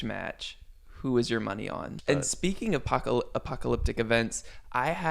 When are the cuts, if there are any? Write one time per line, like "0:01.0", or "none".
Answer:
0:01.9